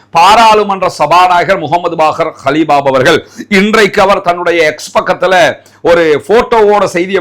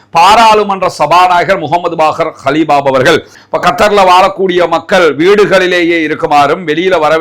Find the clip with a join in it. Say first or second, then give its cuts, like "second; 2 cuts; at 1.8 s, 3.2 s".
second; 1 cut; at 3.3 s